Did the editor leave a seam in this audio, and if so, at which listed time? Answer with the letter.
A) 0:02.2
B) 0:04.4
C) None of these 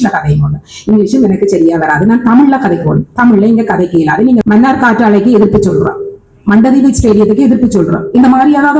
B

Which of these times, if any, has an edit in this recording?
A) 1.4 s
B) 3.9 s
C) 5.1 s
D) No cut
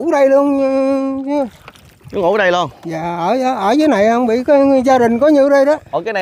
D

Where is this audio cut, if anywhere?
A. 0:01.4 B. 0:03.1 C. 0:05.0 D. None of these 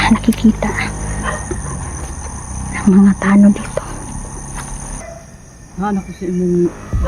C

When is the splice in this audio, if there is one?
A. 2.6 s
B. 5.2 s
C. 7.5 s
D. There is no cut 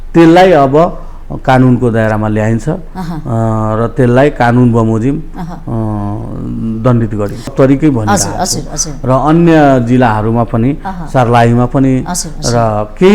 C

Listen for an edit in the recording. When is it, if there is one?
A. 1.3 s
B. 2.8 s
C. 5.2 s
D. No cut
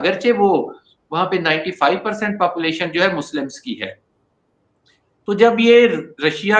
D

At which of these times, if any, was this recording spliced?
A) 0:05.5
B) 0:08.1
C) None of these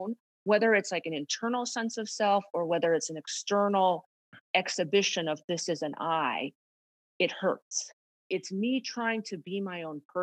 B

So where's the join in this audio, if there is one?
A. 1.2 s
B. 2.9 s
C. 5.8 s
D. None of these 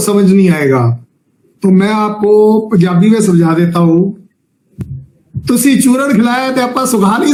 D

